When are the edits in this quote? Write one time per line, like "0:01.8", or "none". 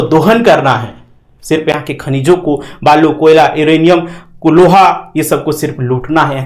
none